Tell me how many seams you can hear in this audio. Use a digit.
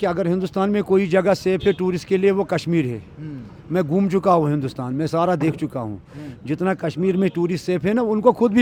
0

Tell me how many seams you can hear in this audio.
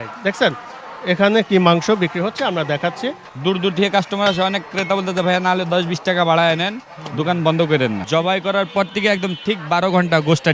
2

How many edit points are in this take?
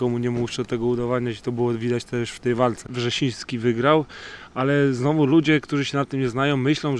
1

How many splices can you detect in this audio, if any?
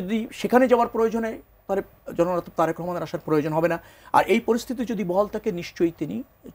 0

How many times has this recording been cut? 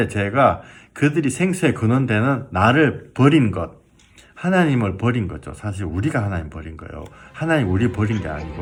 0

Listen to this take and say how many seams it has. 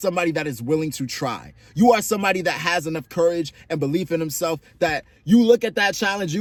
0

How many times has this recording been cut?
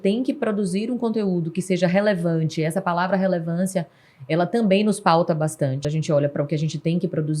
1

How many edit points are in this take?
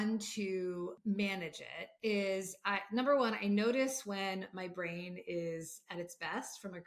1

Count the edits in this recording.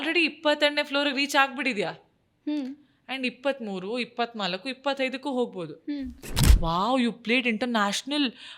1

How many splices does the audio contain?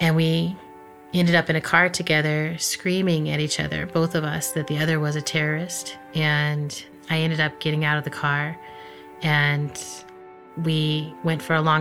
1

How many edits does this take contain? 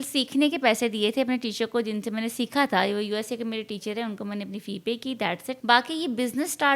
1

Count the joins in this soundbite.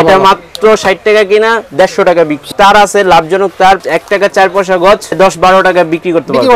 3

